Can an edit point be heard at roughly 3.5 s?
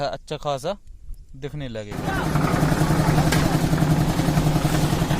no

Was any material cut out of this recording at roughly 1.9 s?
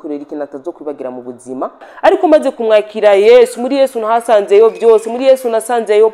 yes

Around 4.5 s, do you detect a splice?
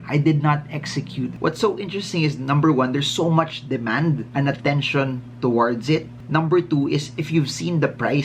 no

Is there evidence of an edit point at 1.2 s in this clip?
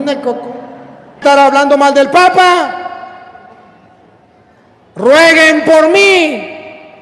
yes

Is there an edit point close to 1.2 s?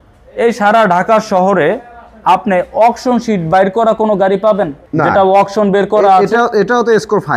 no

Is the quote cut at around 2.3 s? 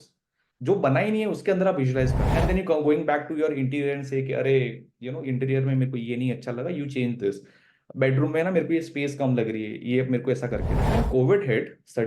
yes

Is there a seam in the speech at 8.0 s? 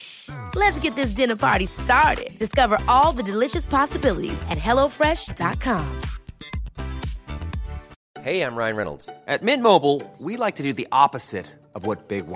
yes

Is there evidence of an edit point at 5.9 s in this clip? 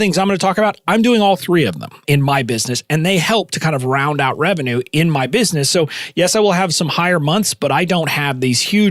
no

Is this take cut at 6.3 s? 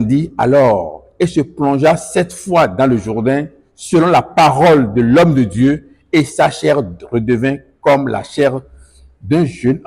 no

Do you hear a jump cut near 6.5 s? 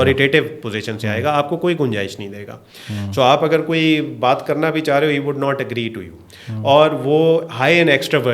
no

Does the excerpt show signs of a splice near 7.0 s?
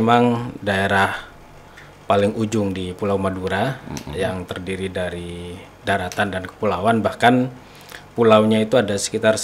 no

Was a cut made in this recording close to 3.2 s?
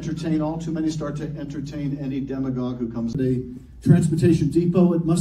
no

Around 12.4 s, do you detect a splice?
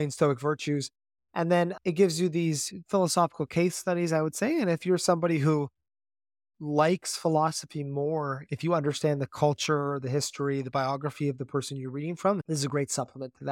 yes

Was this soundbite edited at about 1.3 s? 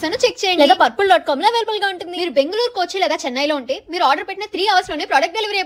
no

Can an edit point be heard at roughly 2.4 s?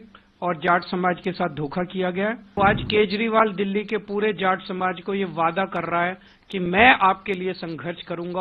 yes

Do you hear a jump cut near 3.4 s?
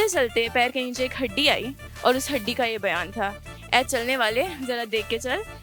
no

